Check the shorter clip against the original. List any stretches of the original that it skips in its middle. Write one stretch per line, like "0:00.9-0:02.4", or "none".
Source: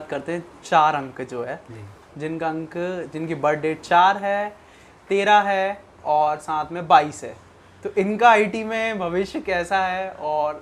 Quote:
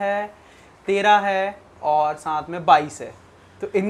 none

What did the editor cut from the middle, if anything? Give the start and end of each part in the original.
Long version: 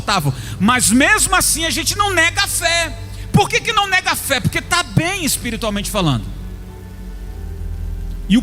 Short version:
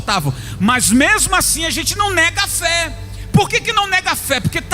none

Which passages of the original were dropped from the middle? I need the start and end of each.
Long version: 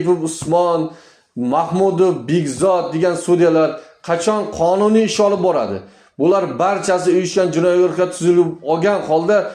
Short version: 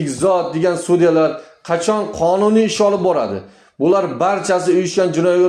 none

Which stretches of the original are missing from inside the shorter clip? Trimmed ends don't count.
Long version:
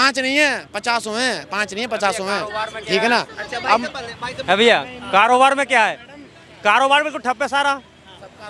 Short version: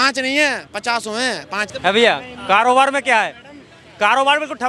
0:01.6-0:04.3

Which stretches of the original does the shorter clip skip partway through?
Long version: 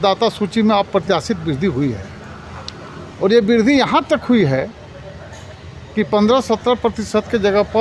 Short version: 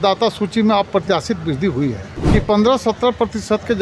0:02.1-0:05.8

